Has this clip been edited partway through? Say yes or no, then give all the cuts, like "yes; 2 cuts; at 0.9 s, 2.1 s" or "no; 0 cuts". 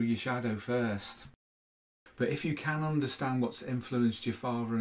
yes; 1 cut; at 1.4 s